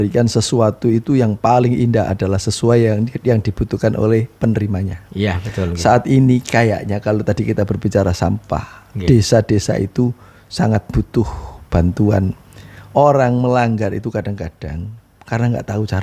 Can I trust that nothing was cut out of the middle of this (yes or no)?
yes